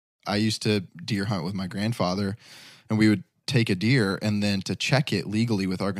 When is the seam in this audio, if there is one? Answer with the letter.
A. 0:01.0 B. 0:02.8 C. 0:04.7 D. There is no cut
A